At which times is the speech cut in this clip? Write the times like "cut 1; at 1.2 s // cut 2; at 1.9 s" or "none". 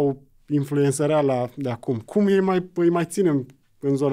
none